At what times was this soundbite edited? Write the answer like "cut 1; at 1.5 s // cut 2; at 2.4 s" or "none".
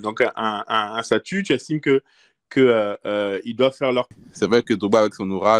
cut 1; at 4.1 s

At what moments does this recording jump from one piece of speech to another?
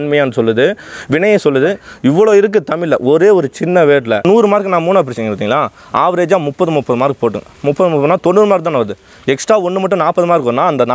cut 1; at 4.2 s

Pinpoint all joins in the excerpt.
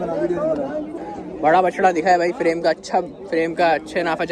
cut 1; at 0.9 s

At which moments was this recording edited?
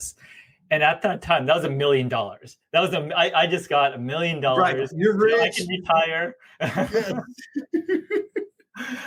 none

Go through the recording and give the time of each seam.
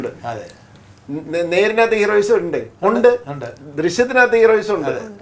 none

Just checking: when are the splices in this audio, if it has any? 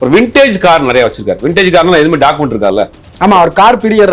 cut 1; at 3.0 s

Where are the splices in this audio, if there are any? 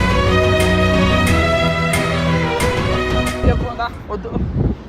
cut 1; at 3.4 s

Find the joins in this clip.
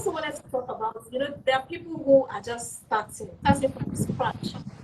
cut 1; at 3.3 s

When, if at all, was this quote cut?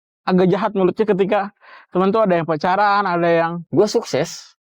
cut 1; at 3.6 s

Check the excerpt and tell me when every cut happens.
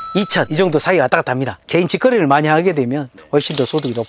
cut 1; at 1.7 s

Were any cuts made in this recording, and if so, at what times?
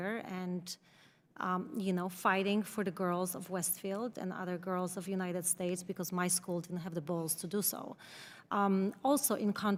none

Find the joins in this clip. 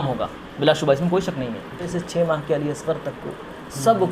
cut 1; at 1.8 s

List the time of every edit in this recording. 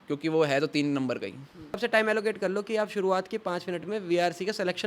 cut 1; at 1.8 s

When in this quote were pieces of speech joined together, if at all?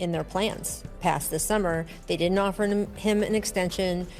cut 1; at 0.9 s

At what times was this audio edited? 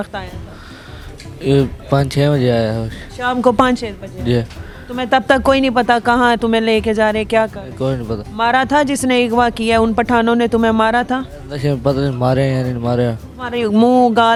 none

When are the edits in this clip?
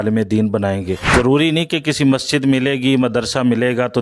cut 1; at 1.0 s

